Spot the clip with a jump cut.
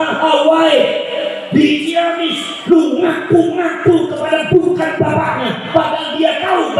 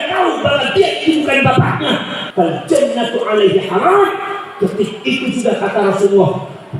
second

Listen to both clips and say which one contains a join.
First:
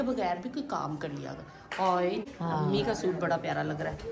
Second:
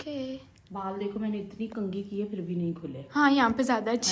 first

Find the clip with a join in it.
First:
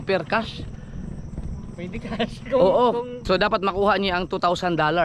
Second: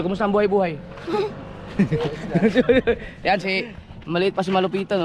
first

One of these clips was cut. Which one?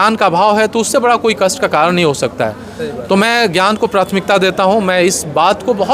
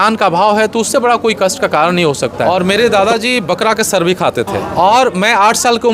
second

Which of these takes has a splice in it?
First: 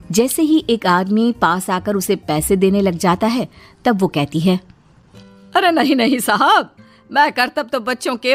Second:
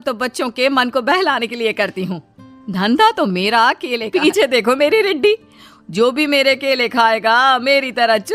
second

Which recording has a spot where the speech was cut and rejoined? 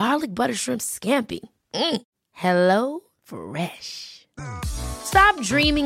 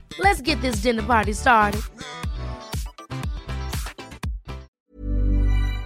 second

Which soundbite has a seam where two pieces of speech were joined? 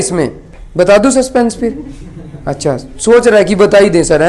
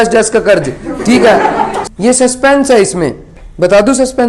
second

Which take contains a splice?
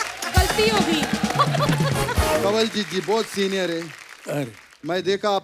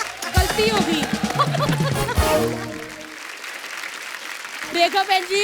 first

